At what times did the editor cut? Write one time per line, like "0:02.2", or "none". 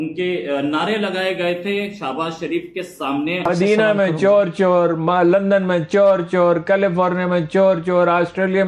0:03.5